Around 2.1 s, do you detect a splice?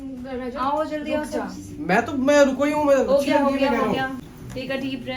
no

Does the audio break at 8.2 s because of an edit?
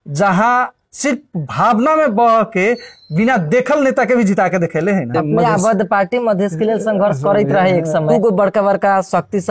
yes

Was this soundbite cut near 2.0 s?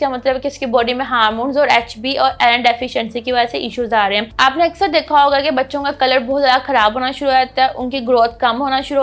no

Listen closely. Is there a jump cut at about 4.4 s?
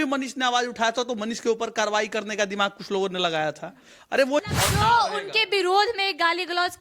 yes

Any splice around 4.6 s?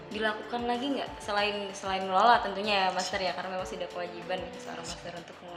no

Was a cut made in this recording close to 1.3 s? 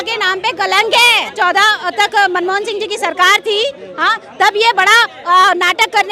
yes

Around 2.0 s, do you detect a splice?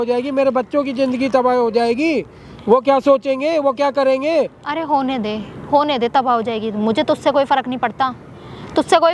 no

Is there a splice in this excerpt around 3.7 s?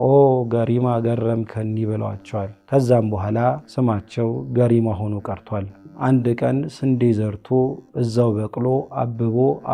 yes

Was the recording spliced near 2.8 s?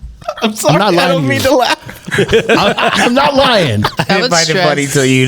no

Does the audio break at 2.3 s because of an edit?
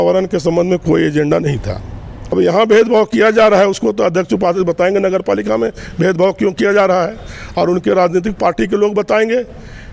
yes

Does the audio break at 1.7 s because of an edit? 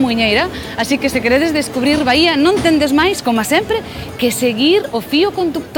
no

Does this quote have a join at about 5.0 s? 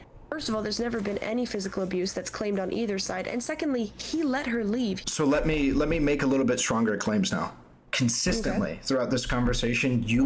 yes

